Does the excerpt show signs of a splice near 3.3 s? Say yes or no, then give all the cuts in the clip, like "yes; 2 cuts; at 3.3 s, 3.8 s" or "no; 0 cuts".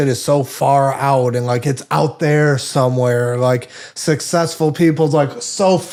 no; 0 cuts